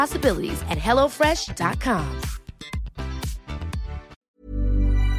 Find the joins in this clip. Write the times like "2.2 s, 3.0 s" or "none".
4.2 s

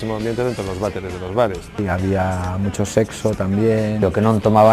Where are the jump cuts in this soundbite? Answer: 1.8 s, 4.0 s

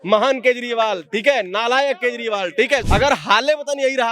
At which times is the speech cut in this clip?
2.8 s

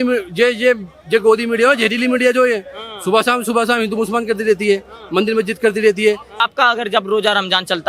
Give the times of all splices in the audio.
6.4 s

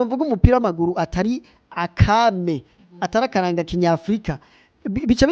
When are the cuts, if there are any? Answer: none

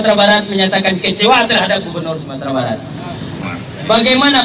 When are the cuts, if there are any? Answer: 3.4 s

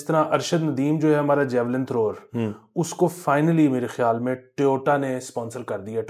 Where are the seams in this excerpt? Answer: none

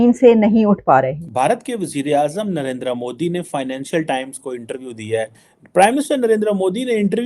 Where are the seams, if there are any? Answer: 1.3 s, 5.5 s

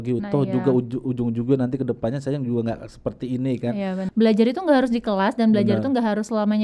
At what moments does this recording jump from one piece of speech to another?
4.0 s

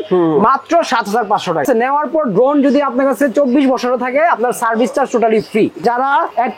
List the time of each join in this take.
1.6 s, 5.8 s

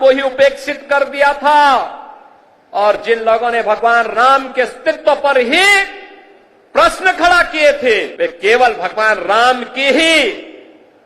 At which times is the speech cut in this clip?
8.1 s

